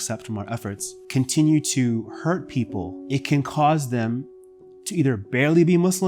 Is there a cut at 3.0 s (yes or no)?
yes